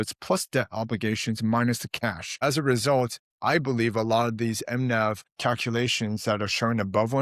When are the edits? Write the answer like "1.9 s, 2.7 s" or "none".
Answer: 2.4 s, 5.3 s